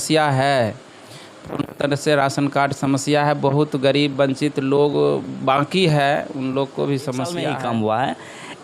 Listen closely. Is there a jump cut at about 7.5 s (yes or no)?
yes